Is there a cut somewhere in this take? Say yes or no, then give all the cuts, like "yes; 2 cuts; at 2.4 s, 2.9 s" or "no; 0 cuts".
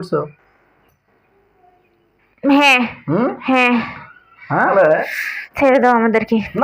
yes; 1 cut; at 4.7 s